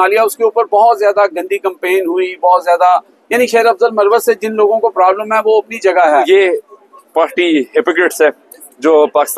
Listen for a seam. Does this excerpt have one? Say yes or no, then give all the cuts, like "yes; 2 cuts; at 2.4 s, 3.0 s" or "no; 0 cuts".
yes; 1 cut; at 6.3 s